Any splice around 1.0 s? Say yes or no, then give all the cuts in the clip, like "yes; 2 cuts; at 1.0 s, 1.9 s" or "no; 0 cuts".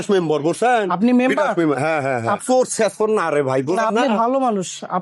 no; 1 cut; at 2.4 s